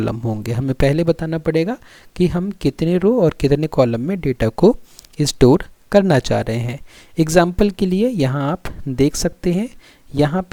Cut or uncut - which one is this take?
uncut